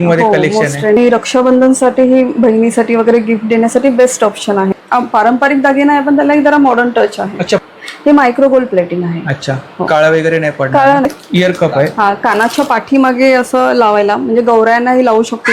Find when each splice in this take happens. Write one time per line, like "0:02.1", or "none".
0:01.0
0:04.8
0:07.6
0:11.0